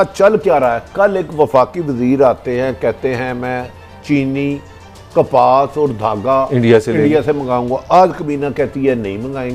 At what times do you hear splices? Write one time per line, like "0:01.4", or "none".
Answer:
none